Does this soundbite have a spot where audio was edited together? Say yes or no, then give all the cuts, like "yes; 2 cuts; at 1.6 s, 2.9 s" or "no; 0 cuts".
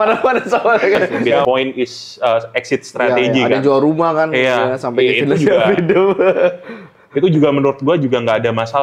yes; 1 cut; at 1.4 s